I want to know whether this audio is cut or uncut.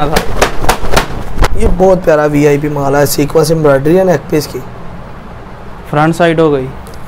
cut